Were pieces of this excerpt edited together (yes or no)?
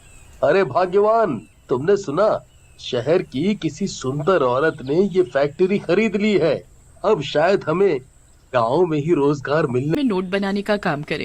yes